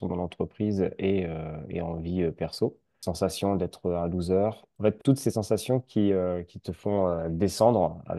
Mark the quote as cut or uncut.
cut